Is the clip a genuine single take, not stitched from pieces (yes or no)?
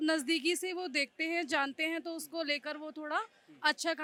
yes